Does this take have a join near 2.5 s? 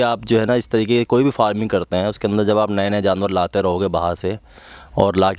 no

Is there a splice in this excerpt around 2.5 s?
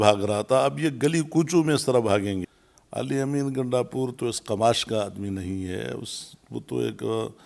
yes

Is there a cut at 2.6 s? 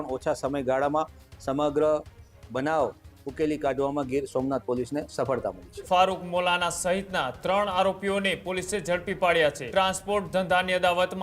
no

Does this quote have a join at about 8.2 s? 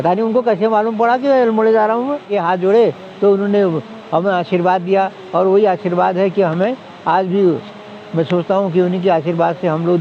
no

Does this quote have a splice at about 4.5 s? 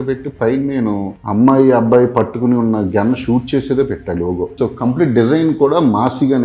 yes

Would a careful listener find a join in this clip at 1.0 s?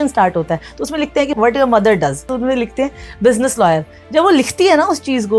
no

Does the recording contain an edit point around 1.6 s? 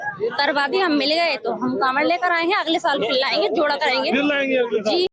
no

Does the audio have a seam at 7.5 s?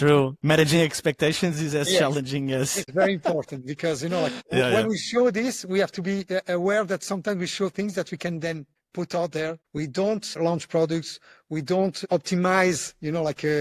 no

